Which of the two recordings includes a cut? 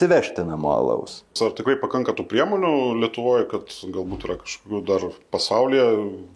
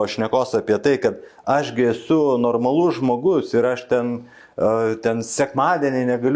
first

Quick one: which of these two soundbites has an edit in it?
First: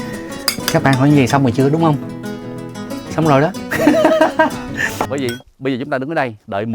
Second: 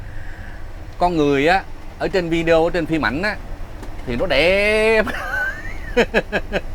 first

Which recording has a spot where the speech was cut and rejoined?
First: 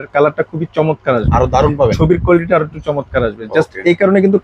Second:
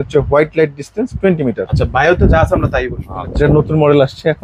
second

